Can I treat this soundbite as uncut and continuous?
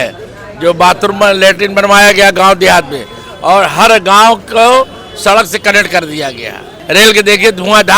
no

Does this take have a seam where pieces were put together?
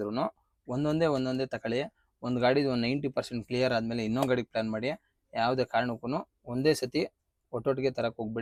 no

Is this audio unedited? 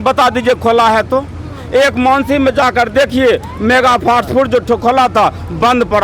yes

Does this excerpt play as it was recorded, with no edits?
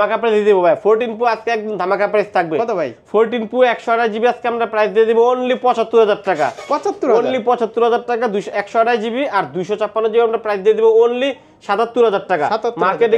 yes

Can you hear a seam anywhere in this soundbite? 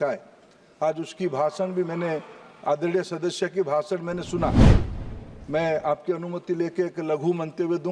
no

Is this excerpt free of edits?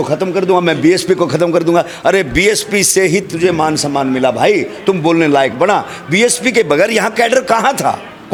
yes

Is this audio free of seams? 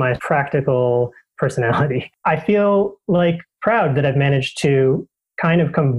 no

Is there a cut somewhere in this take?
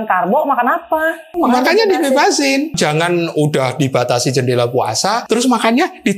yes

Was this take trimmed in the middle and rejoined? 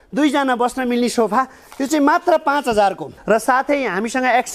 yes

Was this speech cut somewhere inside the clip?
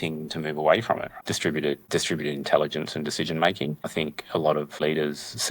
yes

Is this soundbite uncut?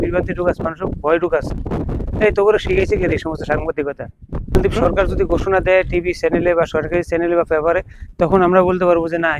no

